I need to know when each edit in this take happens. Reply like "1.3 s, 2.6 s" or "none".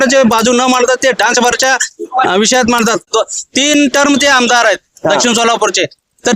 3.1 s